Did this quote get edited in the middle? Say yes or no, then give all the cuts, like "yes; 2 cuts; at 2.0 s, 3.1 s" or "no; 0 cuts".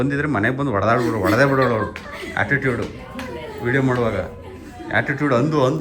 no; 0 cuts